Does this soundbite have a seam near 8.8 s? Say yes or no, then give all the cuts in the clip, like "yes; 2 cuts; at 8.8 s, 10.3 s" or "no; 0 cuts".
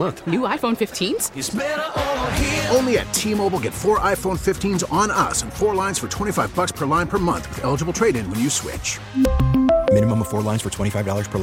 no; 0 cuts